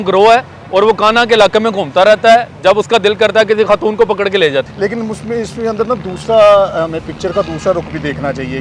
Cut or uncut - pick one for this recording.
uncut